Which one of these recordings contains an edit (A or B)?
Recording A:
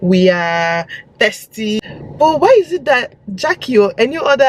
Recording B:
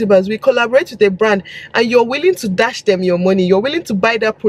A